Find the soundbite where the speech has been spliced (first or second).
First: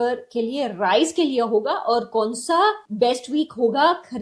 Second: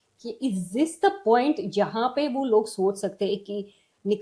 first